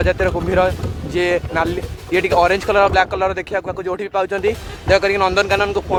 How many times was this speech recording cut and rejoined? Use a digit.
0